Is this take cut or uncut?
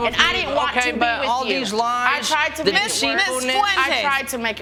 uncut